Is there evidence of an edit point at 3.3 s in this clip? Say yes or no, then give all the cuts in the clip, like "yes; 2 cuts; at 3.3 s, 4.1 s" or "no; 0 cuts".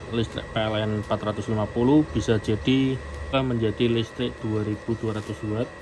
yes; 1 cut; at 3.3 s